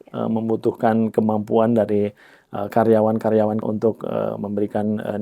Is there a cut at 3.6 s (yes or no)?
yes